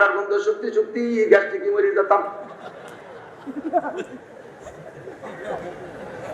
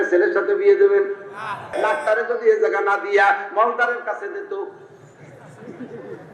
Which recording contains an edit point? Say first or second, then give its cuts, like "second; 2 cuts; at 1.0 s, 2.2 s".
second; 1 cut; at 1.7 s